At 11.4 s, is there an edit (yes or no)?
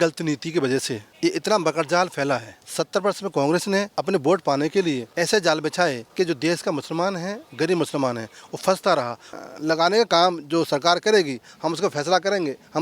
no